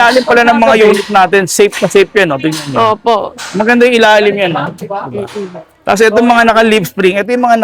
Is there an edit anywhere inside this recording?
no; 0 cuts

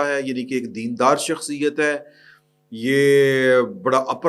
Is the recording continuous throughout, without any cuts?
yes; 0 cuts

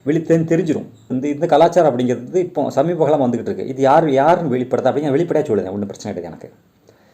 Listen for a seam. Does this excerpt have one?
yes; 1 cut; at 1.1 s

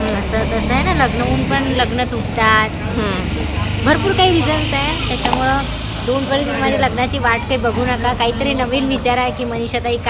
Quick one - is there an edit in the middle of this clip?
no; 0 cuts

